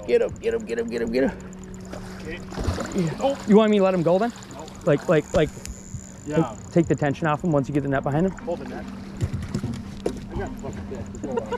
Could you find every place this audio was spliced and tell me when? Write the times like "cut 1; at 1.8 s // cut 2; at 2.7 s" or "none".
cut 1; at 8.4 s